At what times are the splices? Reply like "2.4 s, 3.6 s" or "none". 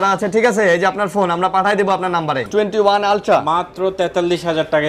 2.5 s